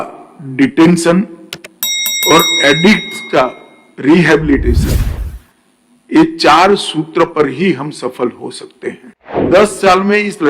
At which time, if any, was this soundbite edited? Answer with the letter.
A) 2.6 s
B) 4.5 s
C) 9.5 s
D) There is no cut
C